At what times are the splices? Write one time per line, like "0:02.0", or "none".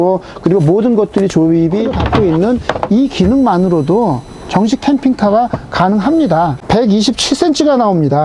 0:02.0
0:06.6